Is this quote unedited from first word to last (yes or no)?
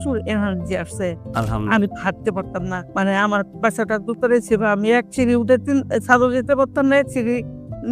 no